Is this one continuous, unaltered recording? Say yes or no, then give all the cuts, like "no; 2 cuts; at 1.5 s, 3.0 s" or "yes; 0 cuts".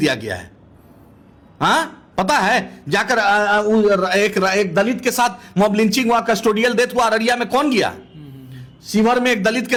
yes; 0 cuts